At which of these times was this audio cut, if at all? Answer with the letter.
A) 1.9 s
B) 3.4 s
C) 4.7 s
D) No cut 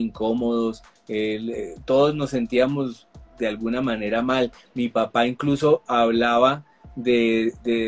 D